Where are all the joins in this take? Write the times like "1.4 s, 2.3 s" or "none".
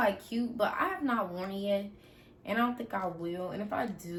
none